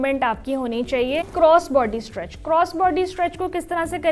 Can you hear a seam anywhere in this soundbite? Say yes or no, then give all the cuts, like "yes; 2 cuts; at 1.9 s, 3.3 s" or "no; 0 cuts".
yes; 1 cut; at 1.3 s